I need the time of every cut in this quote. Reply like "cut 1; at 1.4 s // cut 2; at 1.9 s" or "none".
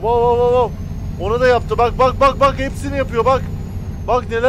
none